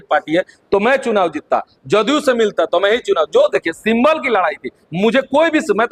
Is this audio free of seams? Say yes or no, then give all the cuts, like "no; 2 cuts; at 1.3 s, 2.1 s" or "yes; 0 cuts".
yes; 0 cuts